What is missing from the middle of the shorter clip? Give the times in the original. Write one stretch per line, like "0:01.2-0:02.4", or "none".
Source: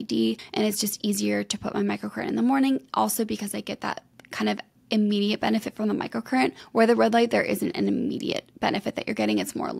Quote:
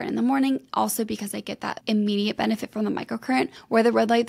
0:04.0-0:04.8